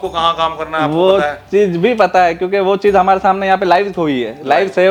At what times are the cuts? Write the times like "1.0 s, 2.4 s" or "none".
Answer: none